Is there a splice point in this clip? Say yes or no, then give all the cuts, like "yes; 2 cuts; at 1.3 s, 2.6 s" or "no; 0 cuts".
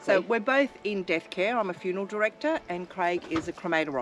no; 0 cuts